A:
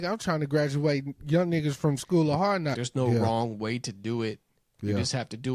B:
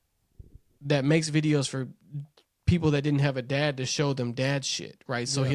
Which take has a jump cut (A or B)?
A